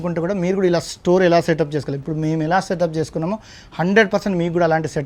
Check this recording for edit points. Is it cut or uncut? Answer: uncut